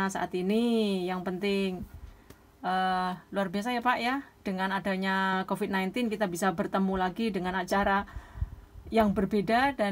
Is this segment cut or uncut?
uncut